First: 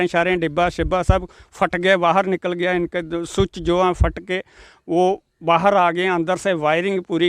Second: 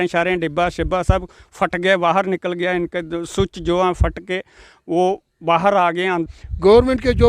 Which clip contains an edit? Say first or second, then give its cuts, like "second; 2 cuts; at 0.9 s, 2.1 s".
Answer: second; 1 cut; at 6.3 s